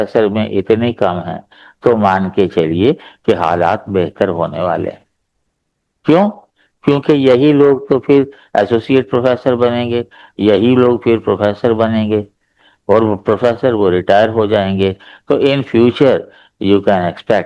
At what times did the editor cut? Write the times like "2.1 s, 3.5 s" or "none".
none